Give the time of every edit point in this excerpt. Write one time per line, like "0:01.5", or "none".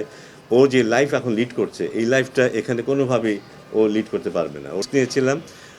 0:04.8